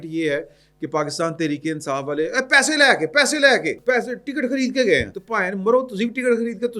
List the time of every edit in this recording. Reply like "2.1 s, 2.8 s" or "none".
3.7 s, 5.2 s